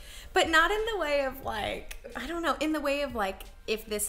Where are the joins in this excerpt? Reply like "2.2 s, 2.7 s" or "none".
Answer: 2.2 s